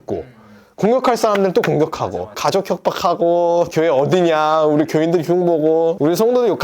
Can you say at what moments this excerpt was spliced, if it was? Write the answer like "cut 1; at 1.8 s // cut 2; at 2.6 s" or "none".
cut 1; at 2.4 s // cut 2; at 3.7 s